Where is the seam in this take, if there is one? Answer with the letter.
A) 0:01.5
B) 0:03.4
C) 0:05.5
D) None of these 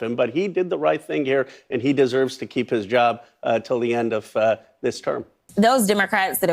C